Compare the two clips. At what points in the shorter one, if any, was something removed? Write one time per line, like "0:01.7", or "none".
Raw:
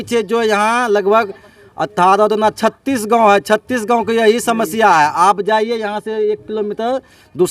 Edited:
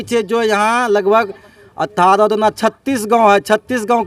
none